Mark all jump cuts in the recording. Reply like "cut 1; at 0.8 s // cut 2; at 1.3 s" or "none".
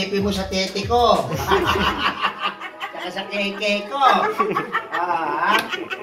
none